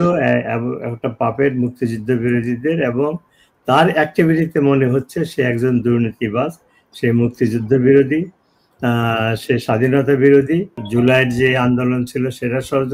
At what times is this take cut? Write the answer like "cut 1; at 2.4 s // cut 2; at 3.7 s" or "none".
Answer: cut 1; at 10.8 s